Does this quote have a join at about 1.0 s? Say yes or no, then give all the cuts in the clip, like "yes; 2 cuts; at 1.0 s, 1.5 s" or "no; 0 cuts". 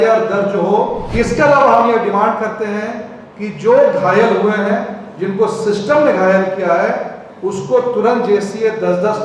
yes; 1 cut; at 1.0 s